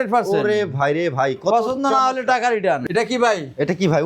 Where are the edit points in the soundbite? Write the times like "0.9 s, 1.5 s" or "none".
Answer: 2.8 s

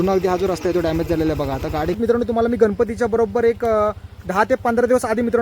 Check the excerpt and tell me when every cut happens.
2.0 s, 4.2 s

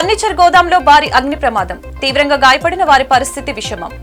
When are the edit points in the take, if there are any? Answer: none

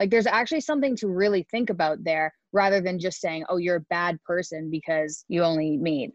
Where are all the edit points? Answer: 5.2 s

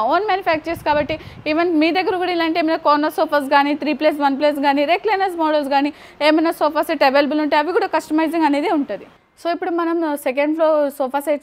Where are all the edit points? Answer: none

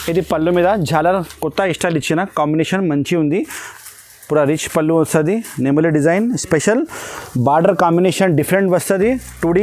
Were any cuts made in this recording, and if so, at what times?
none

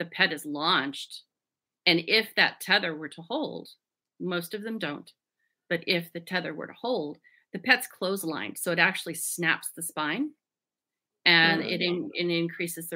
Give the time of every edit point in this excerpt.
none

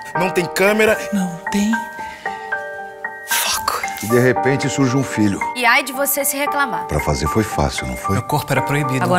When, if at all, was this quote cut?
none

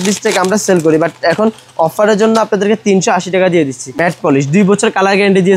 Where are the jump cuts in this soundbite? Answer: 4.0 s

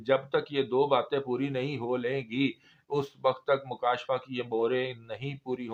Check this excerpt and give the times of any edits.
none

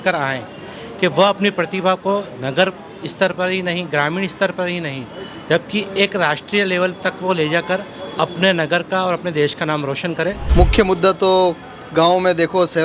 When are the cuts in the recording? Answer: 10.4 s

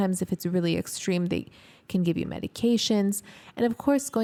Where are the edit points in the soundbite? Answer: none

